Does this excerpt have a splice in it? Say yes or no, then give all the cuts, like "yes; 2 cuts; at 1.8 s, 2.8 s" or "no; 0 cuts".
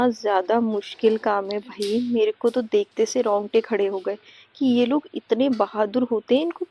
no; 0 cuts